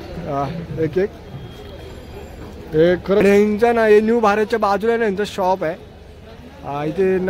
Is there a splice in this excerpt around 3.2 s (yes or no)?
yes